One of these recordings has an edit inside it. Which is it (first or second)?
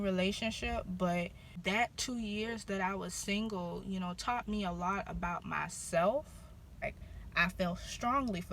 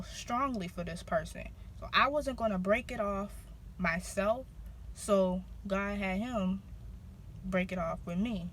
first